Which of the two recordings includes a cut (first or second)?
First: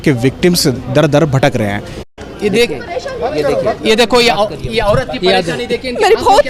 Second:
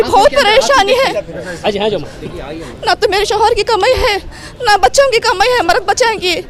first